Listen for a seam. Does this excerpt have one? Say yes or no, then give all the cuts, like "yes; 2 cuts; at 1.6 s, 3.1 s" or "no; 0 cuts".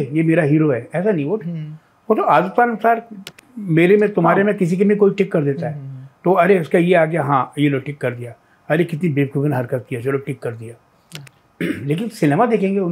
no; 0 cuts